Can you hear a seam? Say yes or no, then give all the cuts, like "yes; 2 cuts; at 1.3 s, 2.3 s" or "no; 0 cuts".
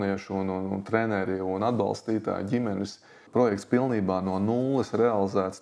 yes; 1 cut; at 3.3 s